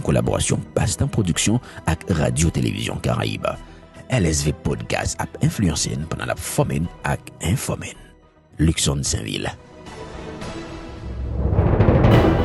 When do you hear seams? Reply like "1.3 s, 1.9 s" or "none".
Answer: 11.2 s